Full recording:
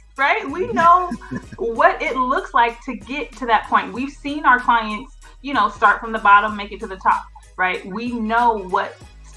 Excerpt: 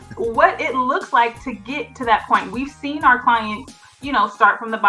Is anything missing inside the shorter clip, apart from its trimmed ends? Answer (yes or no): no